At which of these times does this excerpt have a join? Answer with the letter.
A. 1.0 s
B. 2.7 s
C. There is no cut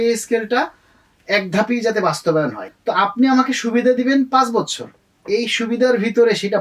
B